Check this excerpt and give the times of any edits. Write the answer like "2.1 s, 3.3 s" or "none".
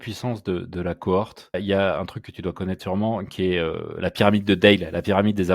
1.6 s